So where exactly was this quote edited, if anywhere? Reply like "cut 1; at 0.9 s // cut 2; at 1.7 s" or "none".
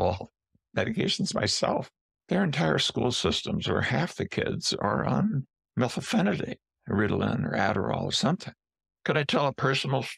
cut 1; at 1.9 s // cut 2; at 5.6 s // cut 3; at 8.7 s